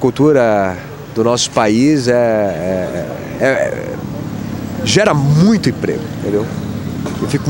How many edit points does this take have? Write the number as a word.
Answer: zero